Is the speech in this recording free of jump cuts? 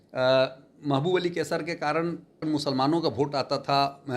no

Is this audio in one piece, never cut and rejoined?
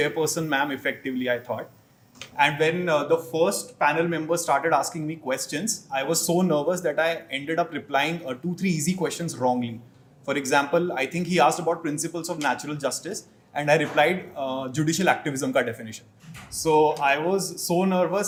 yes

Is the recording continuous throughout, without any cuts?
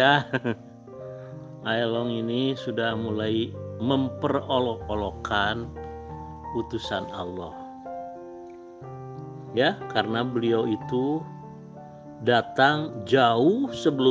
no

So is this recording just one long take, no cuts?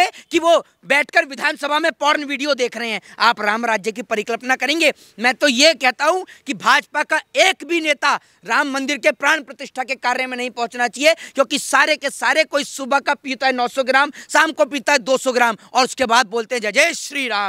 yes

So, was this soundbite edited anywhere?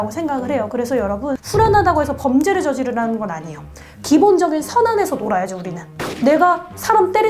yes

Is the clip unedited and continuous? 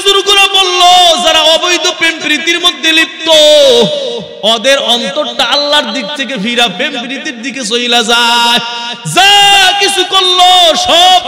no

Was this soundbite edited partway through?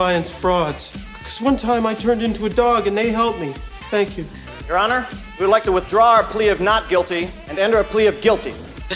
no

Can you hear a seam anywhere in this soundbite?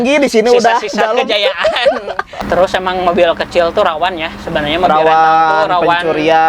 yes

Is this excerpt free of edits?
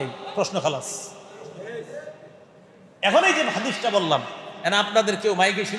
yes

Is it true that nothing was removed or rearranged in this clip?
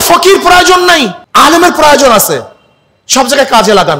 no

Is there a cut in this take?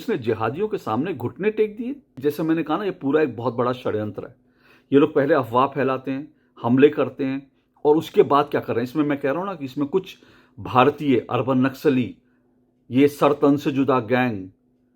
yes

